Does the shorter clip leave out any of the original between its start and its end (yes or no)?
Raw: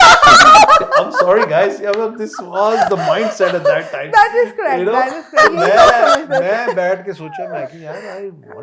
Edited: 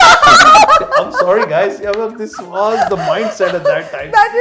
no